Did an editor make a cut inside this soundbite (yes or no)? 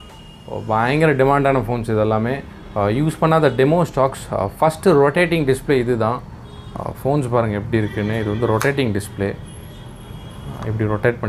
no